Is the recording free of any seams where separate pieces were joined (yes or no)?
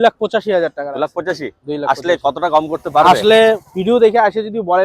yes